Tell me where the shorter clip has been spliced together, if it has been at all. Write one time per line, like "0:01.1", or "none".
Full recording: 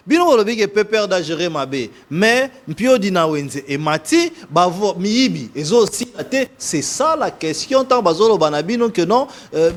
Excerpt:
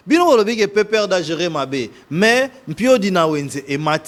none